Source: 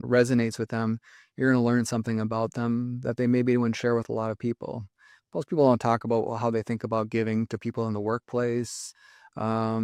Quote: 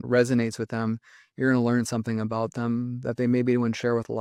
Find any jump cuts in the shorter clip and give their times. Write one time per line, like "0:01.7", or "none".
none